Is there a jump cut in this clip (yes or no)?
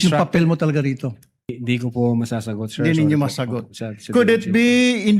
yes